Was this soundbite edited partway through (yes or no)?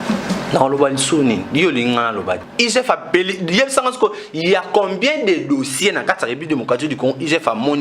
yes